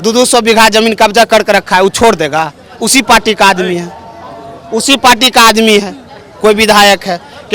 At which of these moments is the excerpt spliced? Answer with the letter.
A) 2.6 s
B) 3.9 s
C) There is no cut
C